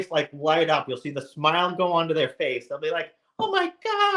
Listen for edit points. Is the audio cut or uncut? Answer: uncut